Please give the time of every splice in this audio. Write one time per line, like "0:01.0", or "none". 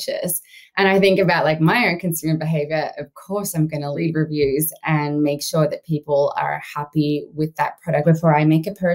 0:04.0
0:08.0